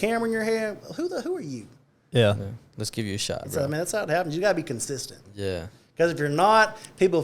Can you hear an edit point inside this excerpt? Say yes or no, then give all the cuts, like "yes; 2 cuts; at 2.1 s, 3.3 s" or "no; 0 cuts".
yes; 1 cut; at 3.4 s